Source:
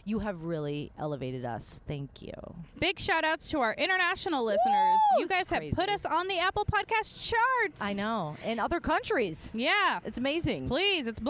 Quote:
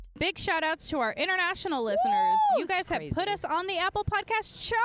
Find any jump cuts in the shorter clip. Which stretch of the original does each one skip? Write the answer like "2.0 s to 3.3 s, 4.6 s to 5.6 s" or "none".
none